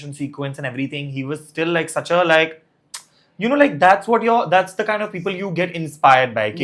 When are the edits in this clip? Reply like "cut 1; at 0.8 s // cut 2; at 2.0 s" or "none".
none